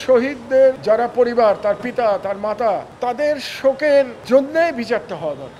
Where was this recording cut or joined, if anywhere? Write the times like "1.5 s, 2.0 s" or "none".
0.8 s, 2.9 s, 4.2 s